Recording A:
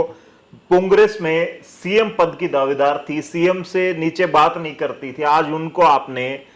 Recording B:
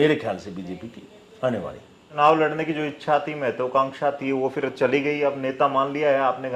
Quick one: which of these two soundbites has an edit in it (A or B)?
B